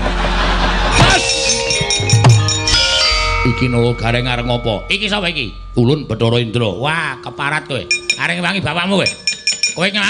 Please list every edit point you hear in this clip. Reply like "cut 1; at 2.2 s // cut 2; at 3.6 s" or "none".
cut 1; at 1.0 s // cut 2; at 2.7 s // cut 3; at 6.0 s